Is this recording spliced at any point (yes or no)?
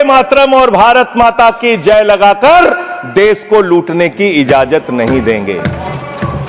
no